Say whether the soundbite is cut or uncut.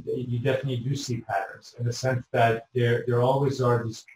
uncut